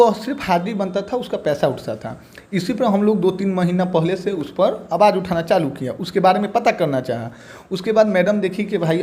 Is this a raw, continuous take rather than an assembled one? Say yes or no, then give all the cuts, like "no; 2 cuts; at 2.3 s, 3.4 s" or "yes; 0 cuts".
yes; 0 cuts